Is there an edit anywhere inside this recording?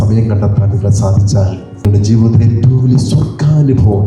yes; 1 cut; at 1.8 s

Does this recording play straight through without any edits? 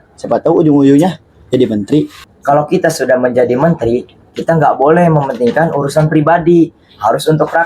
no; 1 cut; at 2.2 s

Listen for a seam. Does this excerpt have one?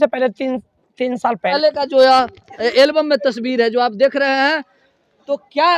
yes; 1 cut; at 1.5 s

